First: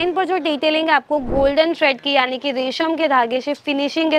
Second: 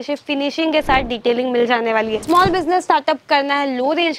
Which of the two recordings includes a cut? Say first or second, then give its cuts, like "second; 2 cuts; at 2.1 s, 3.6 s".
second; 1 cut; at 2.2 s